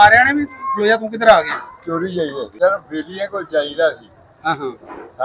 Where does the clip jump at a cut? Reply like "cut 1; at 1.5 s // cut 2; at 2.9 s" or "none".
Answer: cut 1; at 2.4 s

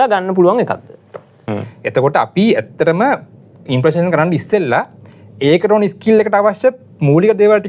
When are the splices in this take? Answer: cut 1; at 1.4 s

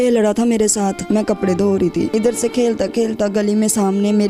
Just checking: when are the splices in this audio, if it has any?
cut 1; at 1.0 s // cut 2; at 2.1 s

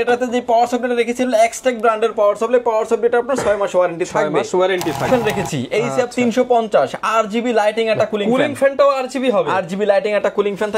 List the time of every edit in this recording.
cut 1; at 5.1 s

